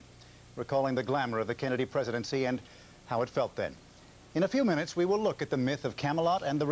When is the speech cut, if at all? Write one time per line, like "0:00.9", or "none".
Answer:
0:01.3